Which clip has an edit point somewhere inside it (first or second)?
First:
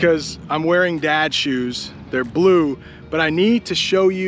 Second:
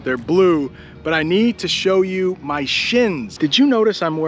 second